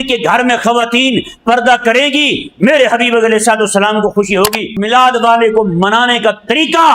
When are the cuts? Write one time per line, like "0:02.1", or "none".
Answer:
0:04.8

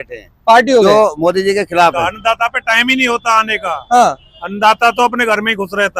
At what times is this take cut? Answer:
0:02.0

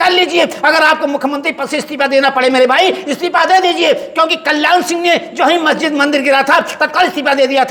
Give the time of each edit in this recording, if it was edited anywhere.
none

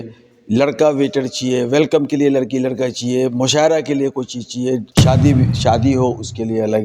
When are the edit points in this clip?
0:04.9

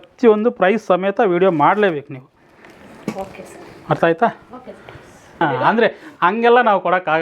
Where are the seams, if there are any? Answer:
0:05.4

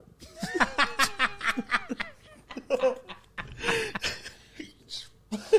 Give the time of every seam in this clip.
none

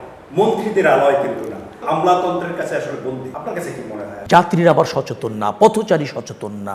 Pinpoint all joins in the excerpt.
0:01.8
0:03.3
0:04.1

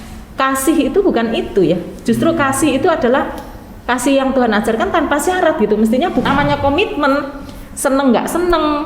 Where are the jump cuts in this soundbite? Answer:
0:06.2

